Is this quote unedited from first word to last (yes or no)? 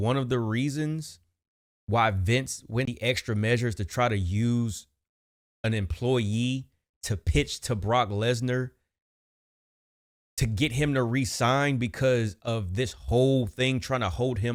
yes